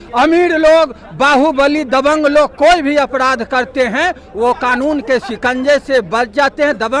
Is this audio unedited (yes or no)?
yes